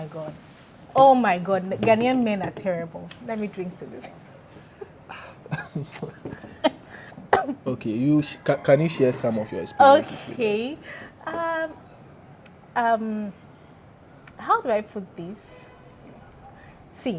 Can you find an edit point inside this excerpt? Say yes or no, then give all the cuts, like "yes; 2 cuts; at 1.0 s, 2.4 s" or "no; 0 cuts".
no; 0 cuts